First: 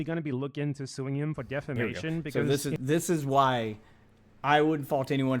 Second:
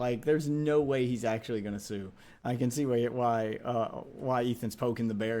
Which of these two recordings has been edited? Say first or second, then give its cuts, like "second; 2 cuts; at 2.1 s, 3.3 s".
first; 1 cut; at 2.3 s